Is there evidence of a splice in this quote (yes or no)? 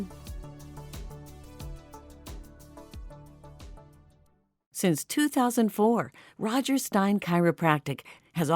yes